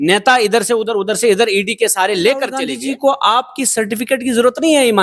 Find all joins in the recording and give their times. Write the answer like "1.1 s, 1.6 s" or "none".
2.6 s